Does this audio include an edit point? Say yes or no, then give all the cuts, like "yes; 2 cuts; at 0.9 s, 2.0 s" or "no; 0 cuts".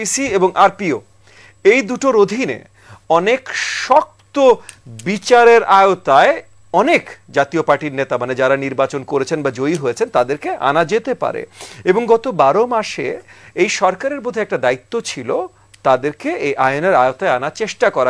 no; 0 cuts